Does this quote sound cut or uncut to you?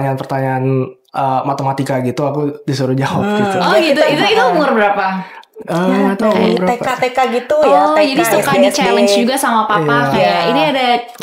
uncut